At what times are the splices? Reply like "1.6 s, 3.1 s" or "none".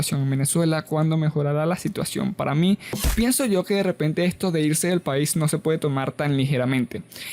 3.0 s